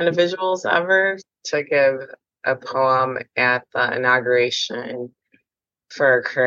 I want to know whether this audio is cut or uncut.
cut